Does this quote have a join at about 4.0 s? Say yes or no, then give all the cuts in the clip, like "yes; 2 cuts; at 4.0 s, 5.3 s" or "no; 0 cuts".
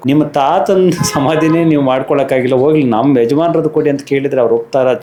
no; 0 cuts